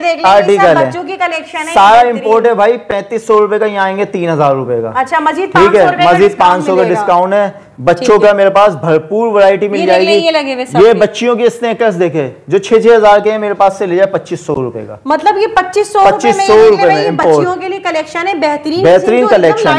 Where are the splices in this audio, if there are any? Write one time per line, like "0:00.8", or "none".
none